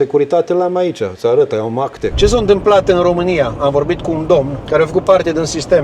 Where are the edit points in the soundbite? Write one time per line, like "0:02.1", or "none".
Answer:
0:02.0
0:04.6